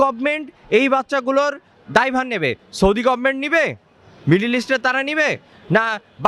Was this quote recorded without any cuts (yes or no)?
yes